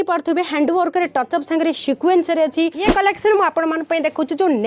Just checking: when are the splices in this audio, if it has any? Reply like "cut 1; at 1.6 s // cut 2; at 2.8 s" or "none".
cut 1; at 2.9 s